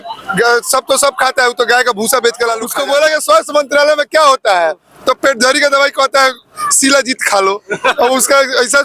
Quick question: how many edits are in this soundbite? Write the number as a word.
one